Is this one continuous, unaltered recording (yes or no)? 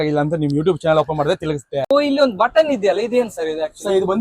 no